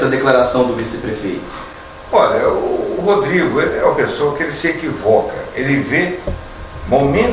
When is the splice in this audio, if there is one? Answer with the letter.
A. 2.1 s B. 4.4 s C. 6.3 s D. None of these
D